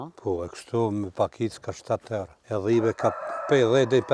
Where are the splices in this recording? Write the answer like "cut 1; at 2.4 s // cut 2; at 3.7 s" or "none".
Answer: cut 1; at 2.4 s